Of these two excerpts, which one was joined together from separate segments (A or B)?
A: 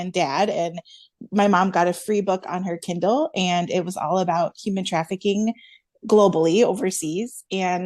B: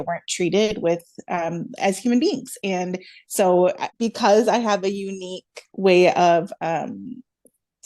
B